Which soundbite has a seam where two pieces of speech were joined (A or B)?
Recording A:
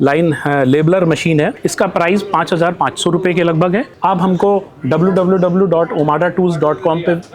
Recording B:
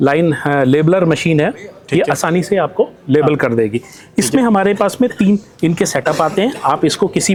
A